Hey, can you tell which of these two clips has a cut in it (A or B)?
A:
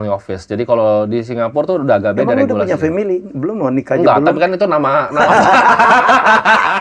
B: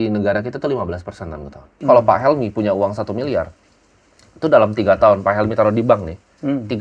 B